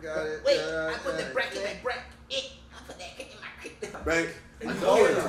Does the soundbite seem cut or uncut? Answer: cut